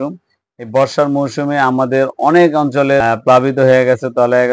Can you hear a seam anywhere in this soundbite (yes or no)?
yes